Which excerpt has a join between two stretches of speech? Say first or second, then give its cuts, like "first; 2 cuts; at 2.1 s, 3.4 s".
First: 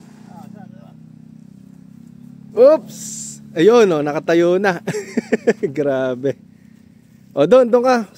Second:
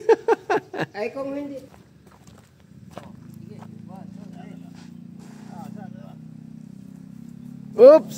second; 1 cut; at 1.6 s